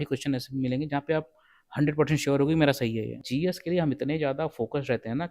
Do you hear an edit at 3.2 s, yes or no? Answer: yes